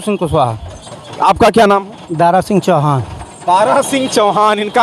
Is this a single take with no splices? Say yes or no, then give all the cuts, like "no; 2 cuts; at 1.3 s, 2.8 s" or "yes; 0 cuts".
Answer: yes; 0 cuts